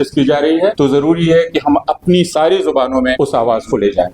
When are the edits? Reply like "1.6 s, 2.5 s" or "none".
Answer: 0.7 s, 3.1 s